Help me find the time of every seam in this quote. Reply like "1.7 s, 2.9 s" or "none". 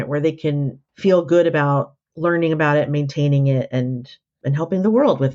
4.4 s